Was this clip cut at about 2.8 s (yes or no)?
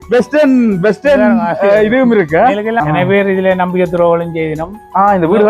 yes